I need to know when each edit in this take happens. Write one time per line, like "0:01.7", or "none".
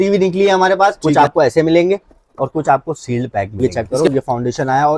0:01.0
0:03.6